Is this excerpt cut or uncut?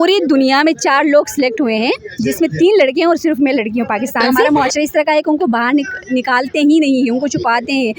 cut